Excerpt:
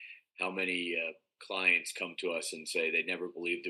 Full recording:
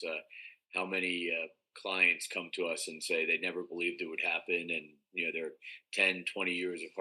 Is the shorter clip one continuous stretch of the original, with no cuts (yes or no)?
yes